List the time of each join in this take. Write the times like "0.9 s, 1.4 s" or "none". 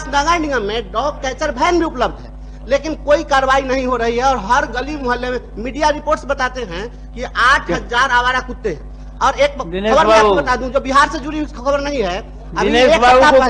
none

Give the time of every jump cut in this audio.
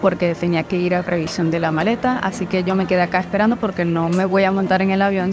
none

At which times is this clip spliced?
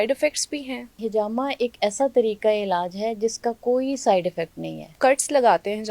0.9 s, 4.9 s

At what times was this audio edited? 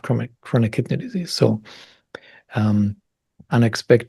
none

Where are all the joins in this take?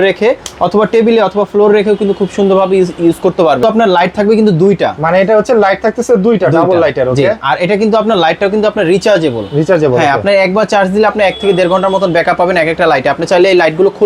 3.6 s

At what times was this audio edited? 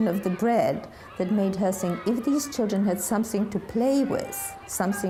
none

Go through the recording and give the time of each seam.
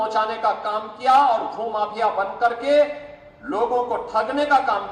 none

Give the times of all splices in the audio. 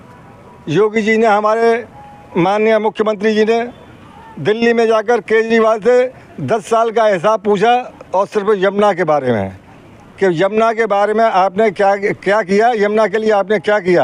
none

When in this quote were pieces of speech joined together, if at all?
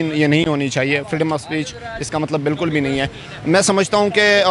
none

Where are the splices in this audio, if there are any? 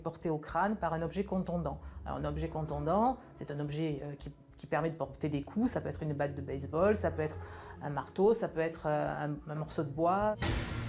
none

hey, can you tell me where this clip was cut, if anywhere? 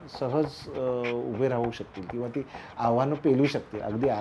none

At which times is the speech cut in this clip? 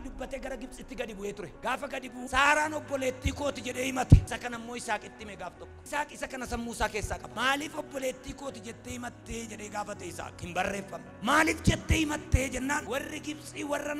none

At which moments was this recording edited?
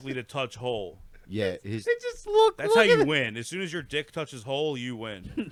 none

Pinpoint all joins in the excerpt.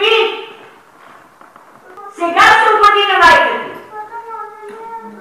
1.9 s

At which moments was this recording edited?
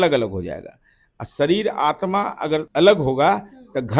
2.7 s

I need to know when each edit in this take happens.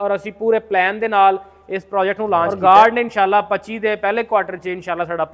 2.5 s

